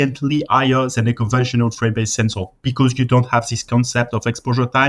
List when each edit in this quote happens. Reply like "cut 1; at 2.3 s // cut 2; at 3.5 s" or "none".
none